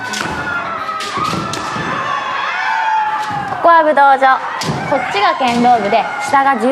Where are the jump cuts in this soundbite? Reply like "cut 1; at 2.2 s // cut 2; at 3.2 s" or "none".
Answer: cut 1; at 3.5 s